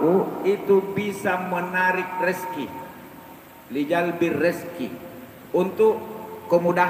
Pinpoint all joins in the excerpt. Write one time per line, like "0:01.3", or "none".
none